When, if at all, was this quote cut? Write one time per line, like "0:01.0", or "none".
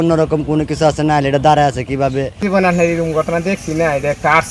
0:02.3